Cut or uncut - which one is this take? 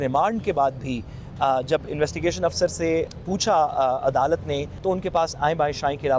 cut